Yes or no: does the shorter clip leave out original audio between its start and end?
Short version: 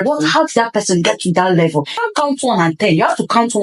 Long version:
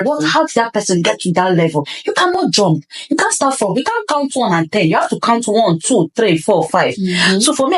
yes